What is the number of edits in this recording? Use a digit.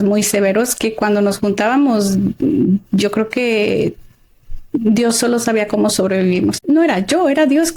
1